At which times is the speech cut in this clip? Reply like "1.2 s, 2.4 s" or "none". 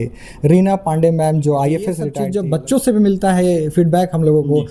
2.1 s